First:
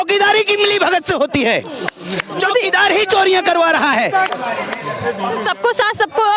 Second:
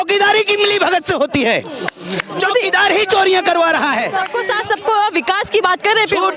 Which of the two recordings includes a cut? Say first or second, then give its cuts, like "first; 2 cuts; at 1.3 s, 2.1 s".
second; 1 cut; at 4.3 s